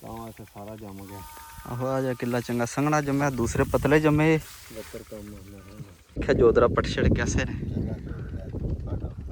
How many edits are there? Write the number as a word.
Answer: one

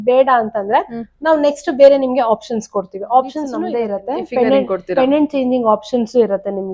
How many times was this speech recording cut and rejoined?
one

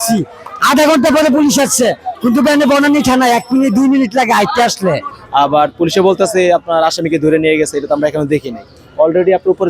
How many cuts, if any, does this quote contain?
one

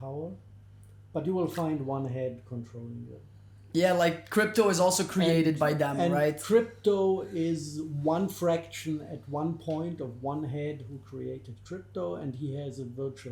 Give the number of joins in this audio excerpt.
zero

